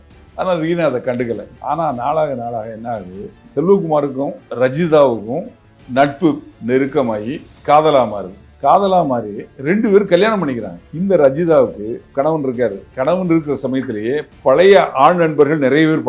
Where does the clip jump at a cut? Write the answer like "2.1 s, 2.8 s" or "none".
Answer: 10.8 s